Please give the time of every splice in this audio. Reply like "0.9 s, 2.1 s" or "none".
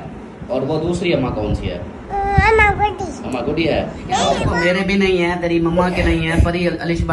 4.5 s